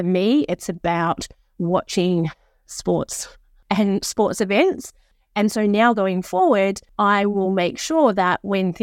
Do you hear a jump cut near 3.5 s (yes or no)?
yes